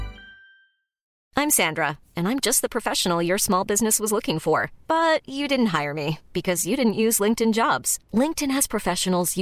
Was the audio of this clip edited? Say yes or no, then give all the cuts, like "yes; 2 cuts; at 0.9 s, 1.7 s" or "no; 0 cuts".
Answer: yes; 1 cut; at 1.1 s